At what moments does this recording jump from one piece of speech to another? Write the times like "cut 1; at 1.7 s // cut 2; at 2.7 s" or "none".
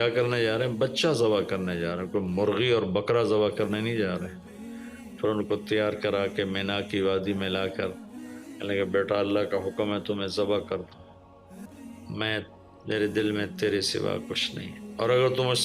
cut 1; at 11.7 s